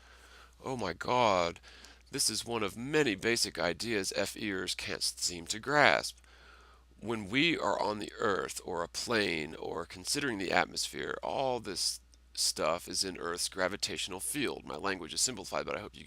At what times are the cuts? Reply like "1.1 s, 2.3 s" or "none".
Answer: 2.1 s